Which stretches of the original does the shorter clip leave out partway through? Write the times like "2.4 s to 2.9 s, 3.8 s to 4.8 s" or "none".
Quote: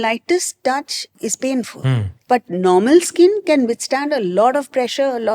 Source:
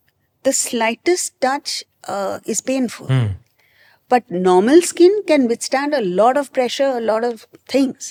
1.9 s to 2.4 s, 3.4 s to 3.9 s